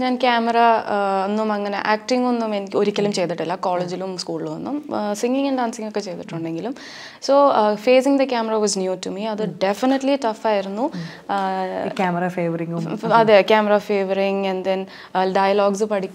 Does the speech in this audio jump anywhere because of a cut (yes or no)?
no